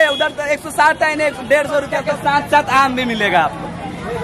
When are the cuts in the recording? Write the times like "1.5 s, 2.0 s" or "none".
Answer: 2.1 s